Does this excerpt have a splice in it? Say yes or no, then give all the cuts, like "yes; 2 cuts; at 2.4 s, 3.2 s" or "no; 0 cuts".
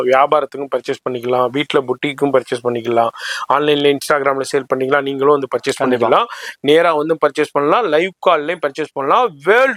no; 0 cuts